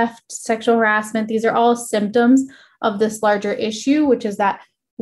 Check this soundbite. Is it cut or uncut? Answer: uncut